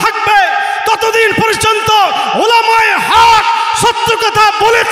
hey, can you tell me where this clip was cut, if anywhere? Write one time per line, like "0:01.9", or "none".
none

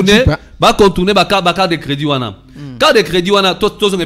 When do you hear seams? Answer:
none

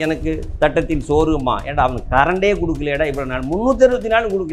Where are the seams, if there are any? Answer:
none

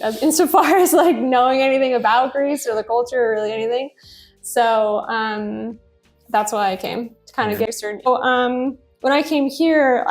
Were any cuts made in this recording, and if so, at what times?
0:08.1

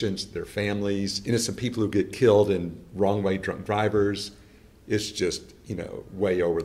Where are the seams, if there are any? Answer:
0:01.2

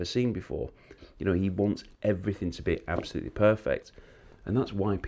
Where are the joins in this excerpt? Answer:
0:01.0

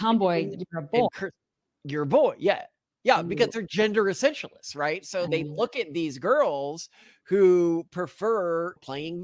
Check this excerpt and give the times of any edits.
none

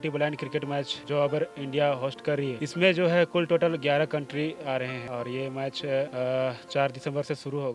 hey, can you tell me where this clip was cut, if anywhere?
0:01.0
0:02.6
0:05.0
0:06.1

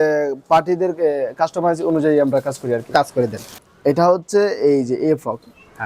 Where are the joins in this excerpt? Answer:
0:03.6

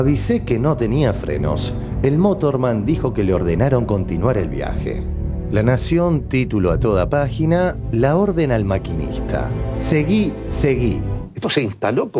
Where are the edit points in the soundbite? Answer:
0:11.3

